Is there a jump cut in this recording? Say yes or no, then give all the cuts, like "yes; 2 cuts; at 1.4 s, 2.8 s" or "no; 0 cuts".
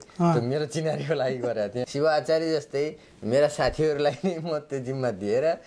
yes; 1 cut; at 1.8 s